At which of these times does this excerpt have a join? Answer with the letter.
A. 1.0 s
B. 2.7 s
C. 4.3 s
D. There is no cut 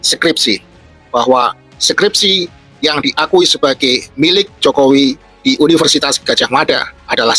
A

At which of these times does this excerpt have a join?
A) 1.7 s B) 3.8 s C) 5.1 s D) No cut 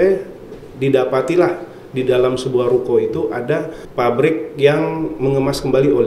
B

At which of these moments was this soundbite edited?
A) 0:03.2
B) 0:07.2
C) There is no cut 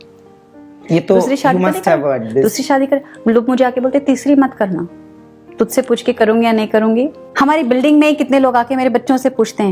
B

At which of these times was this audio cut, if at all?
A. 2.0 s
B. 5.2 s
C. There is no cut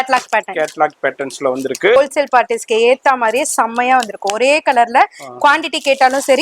A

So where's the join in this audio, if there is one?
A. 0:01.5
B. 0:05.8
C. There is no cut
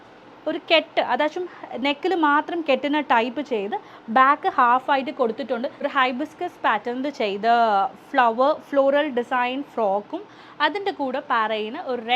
B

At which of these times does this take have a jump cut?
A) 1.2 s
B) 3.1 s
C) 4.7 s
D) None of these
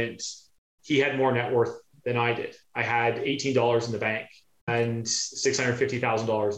C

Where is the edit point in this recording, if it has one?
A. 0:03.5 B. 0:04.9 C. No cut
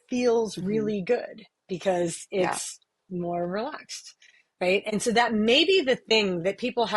B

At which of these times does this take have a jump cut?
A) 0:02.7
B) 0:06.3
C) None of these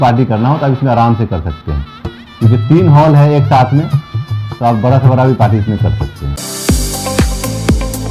B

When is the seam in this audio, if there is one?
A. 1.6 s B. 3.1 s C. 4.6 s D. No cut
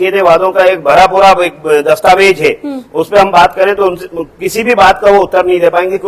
D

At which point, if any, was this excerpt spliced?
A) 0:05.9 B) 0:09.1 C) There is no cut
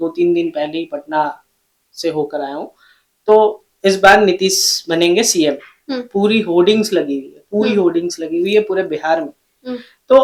C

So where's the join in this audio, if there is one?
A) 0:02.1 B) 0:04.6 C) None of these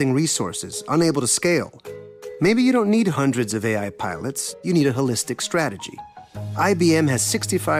C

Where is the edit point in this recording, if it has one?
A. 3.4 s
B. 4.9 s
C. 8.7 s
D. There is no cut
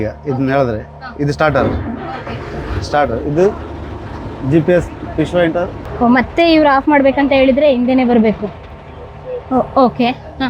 D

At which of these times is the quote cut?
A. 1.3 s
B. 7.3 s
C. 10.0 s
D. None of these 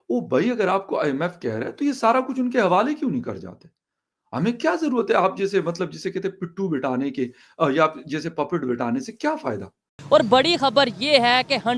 C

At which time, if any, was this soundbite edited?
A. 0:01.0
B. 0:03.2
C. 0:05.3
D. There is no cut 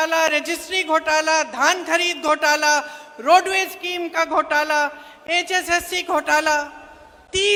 D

